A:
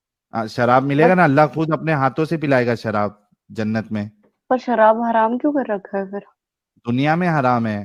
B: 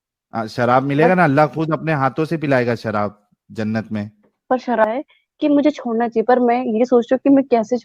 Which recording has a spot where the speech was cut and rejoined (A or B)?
B